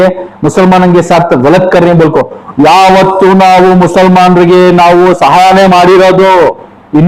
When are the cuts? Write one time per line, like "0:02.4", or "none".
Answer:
none